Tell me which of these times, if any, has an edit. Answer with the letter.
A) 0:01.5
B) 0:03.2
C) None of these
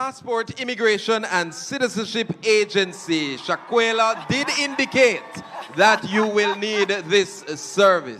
C